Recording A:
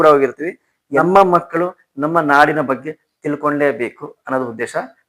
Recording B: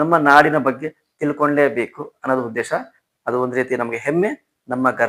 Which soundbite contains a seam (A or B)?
A